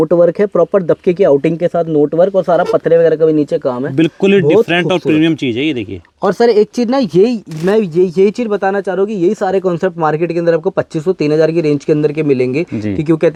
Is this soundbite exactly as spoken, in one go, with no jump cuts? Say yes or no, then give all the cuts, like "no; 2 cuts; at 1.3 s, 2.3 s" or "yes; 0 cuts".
yes; 0 cuts